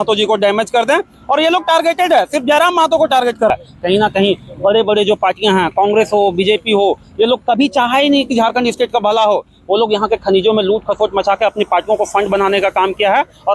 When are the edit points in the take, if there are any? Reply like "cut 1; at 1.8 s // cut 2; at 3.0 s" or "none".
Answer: cut 1; at 3.5 s